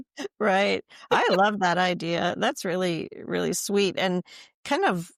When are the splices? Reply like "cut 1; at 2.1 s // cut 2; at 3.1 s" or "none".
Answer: none